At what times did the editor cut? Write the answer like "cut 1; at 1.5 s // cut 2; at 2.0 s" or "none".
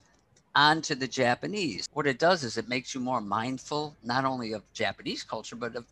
cut 1; at 1.8 s